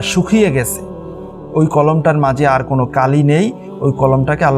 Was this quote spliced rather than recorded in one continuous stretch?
yes; 1 cut; at 2.9 s

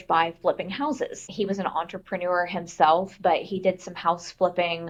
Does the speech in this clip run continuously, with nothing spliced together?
yes; 0 cuts

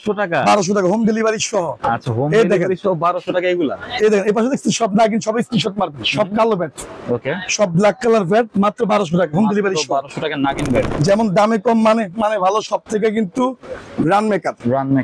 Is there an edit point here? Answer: yes; 1 cut; at 10.9 s

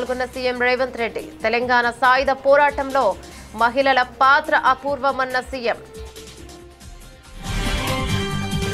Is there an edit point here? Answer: yes; 1 cut; at 5.9 s

